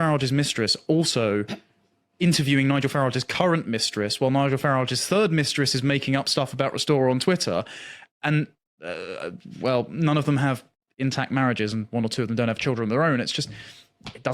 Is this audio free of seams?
yes; 0 cuts

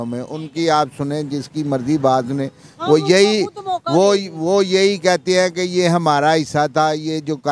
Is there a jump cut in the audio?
no; 0 cuts

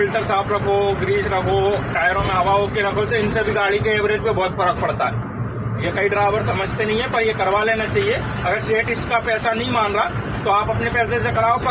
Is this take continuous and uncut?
yes; 0 cuts

